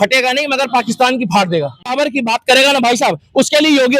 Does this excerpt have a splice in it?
yes; 1 cut; at 1.9 s

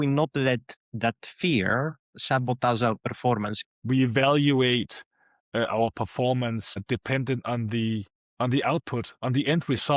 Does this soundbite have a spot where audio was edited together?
yes; 2 cuts; at 3.7 s, 6.8 s

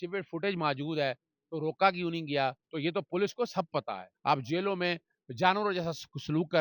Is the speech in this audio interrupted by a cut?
yes; 2 cuts; at 2.7 s, 4.1 s

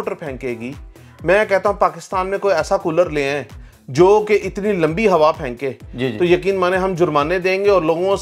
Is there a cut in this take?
no; 0 cuts

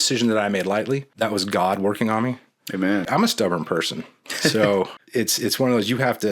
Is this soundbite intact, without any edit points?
no; 3 cuts; at 1.1 s, 3.1 s, 5.0 s

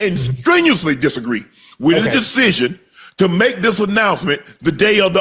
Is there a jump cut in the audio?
no; 0 cuts

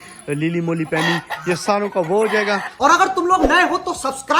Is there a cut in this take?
yes; 1 cut; at 3.0 s

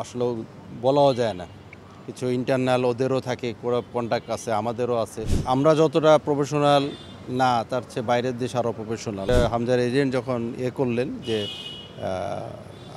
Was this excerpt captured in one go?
no; 2 cuts; at 5.3 s, 9.3 s

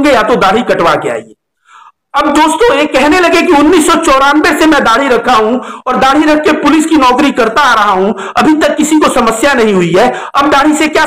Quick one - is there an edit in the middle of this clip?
no; 0 cuts

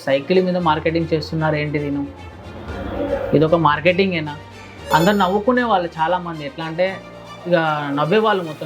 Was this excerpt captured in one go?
yes; 0 cuts

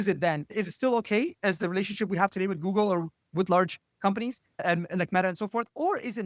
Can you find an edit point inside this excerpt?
no; 0 cuts

